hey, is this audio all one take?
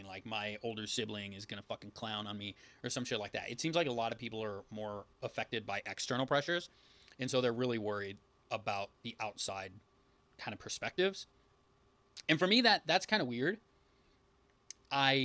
yes; 0 cuts

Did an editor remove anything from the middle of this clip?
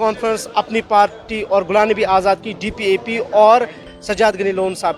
yes; 1 cut; at 3.8 s

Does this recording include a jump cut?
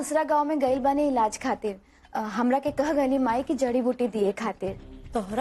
no; 0 cuts

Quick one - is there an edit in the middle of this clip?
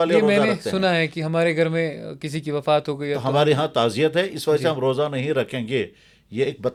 no; 0 cuts

